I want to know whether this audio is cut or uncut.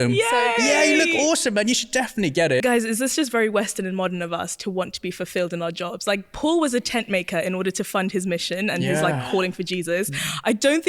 cut